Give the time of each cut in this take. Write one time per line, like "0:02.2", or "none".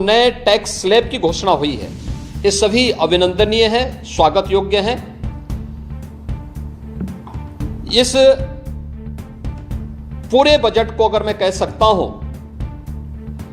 0:05.0
0:07.8